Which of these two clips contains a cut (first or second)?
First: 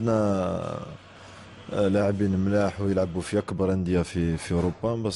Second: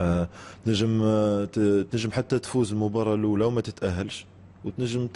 second